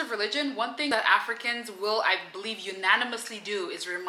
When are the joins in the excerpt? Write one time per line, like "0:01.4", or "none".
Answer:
0:00.9